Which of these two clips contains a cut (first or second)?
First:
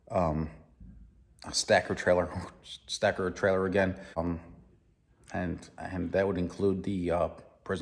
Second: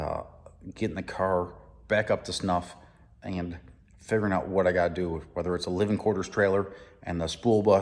first